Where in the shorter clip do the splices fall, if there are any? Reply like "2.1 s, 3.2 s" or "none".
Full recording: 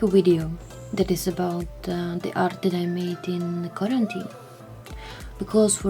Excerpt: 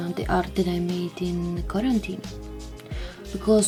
none